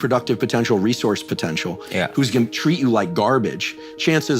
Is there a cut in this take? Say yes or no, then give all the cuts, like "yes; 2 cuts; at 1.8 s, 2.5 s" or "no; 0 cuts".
no; 0 cuts